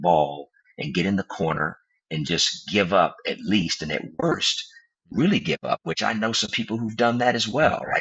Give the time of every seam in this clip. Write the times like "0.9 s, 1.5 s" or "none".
none